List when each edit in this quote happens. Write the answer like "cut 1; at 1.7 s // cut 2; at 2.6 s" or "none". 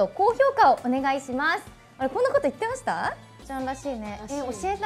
cut 1; at 3.4 s